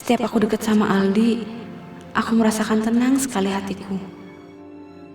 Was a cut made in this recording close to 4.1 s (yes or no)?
yes